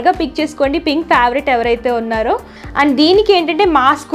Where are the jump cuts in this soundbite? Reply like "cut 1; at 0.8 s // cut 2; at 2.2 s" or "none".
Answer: cut 1; at 2.6 s

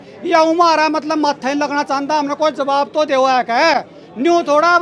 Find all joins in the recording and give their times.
none

